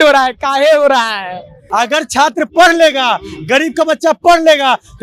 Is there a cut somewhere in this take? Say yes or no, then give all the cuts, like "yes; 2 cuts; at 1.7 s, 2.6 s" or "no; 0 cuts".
yes; 1 cut; at 1.6 s